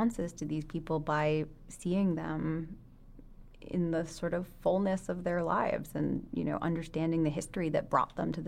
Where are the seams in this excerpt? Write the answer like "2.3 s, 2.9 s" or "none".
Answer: none